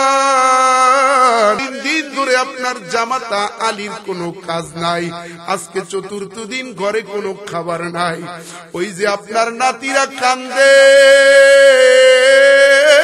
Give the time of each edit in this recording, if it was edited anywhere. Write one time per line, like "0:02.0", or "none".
0:01.6